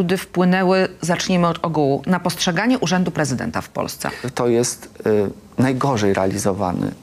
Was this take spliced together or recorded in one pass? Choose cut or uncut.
cut